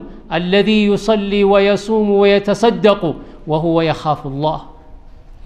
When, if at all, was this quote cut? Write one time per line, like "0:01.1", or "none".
none